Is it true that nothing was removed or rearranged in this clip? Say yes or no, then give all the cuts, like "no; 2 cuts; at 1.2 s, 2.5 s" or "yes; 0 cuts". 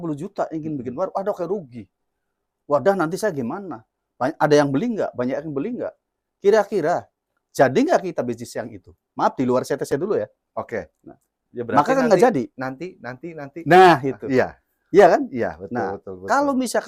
yes; 0 cuts